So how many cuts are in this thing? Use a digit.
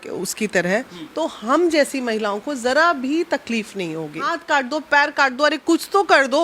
1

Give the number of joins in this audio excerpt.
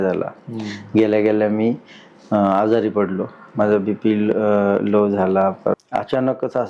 1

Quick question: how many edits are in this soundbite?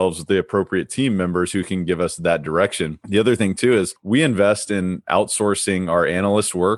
2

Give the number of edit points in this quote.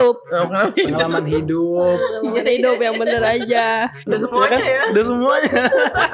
1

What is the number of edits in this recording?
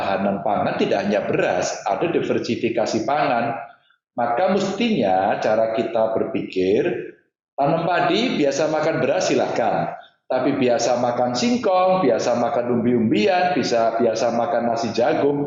0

